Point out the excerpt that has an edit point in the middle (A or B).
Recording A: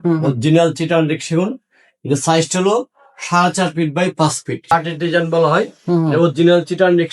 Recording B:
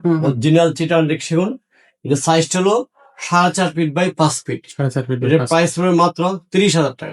A